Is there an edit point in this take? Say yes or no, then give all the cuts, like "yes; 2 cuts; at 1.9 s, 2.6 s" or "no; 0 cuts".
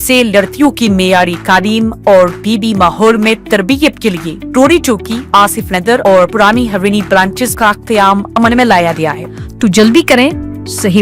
yes; 1 cut; at 9.2 s